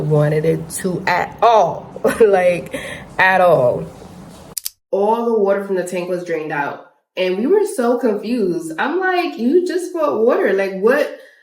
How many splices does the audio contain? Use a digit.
1